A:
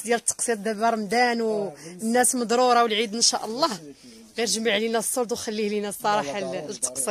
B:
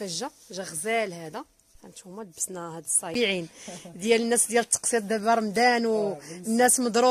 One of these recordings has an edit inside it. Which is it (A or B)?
B